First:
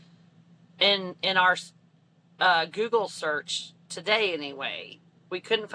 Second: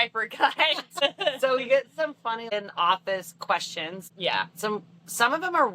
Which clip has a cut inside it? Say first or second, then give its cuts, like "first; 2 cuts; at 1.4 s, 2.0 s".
second; 3 cuts; at 1.0 s, 2.5 s, 4.1 s